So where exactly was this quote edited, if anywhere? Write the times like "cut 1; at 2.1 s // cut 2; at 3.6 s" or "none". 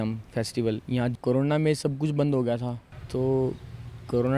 cut 1; at 1.1 s // cut 2; at 3.0 s